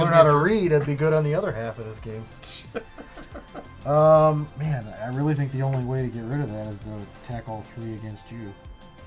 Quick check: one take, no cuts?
yes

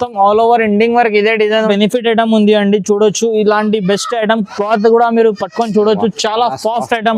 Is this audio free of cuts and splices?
no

